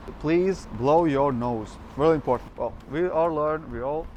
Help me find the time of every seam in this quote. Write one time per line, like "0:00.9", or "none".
none